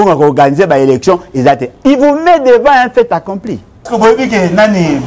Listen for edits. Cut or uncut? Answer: cut